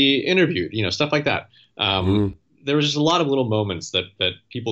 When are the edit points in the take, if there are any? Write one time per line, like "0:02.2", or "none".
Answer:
none